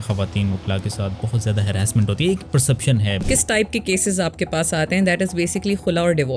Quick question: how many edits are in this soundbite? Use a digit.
1